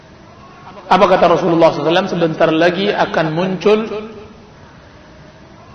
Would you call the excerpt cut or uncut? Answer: uncut